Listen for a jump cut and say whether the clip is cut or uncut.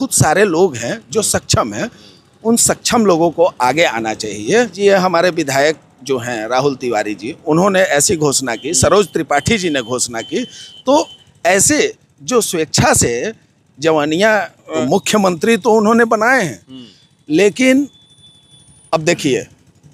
cut